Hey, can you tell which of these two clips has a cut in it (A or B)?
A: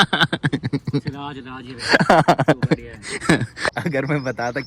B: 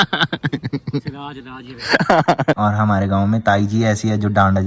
B